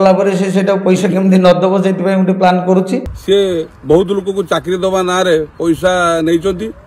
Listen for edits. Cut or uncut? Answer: cut